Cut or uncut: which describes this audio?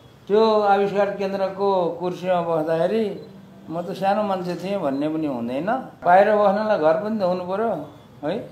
cut